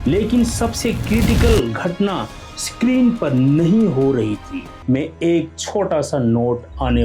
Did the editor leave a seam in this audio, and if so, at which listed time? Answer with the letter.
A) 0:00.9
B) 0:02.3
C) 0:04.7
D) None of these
C